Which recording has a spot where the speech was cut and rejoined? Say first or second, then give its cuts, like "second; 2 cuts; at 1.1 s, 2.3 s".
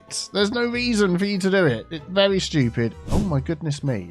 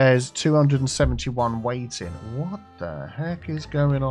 first; 1 cut; at 3.0 s